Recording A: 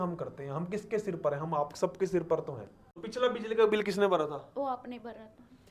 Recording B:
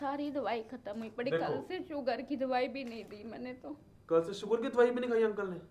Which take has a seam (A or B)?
A